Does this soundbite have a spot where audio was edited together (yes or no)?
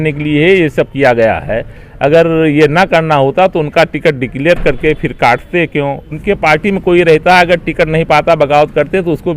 yes